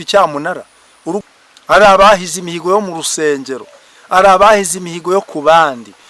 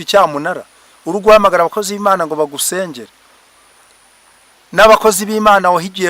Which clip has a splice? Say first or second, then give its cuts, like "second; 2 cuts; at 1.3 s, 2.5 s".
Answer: first; 1 cut; at 1.2 s